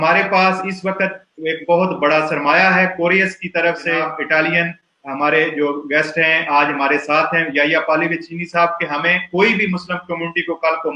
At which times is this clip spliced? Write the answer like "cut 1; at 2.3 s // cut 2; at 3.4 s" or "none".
cut 1; at 4.2 s